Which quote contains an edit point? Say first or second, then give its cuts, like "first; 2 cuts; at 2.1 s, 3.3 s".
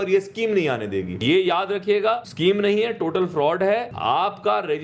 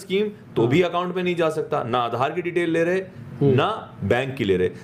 first; 3 cuts; at 1.2 s, 2.3 s, 3.9 s